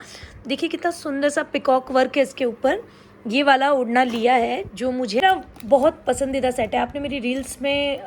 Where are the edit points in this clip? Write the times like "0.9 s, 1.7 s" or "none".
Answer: 5.2 s